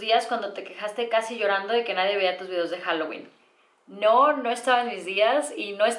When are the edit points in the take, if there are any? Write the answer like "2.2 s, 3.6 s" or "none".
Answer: none